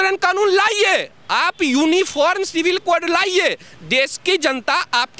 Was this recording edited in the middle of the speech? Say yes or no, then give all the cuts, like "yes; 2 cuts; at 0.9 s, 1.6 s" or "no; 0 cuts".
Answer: no; 0 cuts